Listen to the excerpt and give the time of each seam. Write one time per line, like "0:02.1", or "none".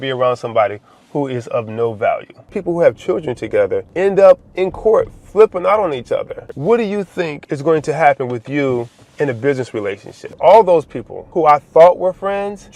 0:02.5
0:06.5
0:10.2